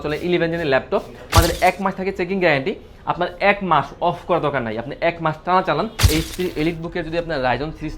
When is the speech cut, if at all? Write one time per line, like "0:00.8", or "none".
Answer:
0:01.3
0:06.0